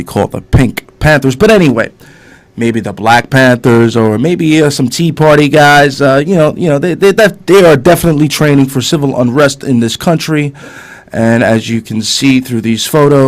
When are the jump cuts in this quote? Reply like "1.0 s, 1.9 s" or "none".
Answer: 7.6 s